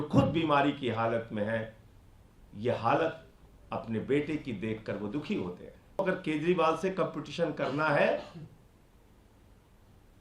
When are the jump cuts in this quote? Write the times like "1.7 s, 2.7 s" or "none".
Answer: 6.0 s